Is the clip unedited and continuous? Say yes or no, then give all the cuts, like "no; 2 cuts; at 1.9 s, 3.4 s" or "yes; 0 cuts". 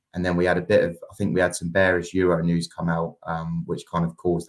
yes; 0 cuts